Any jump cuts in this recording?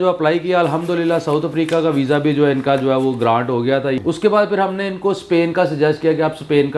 yes; 1 cut; at 4.0 s

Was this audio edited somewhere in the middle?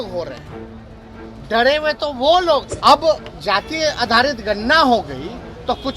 yes; 1 cut; at 2.7 s

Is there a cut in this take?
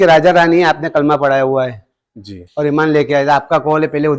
no; 0 cuts

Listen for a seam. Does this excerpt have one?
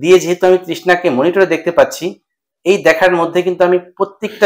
no; 0 cuts

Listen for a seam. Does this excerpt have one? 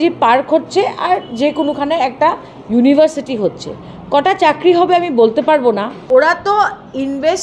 yes; 1 cut; at 6.0 s

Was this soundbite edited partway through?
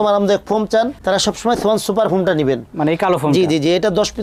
no; 0 cuts

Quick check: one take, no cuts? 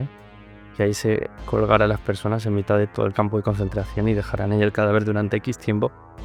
yes; 0 cuts

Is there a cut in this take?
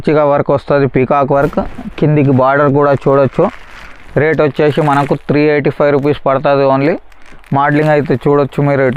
no; 0 cuts

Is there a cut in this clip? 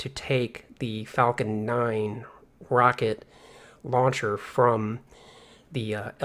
no; 0 cuts

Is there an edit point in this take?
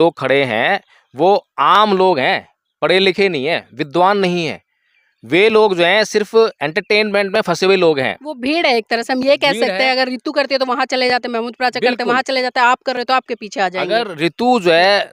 no; 0 cuts

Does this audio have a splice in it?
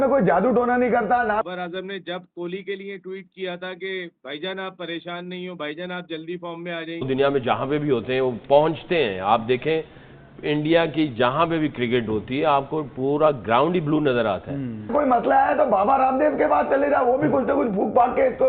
yes; 3 cuts; at 1.4 s, 7.1 s, 14.9 s

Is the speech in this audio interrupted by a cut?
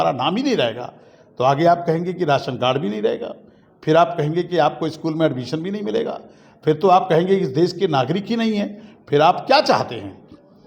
no; 0 cuts

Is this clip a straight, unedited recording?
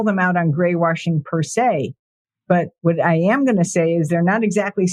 yes; 0 cuts

